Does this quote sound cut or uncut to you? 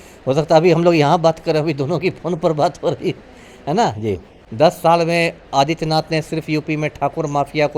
cut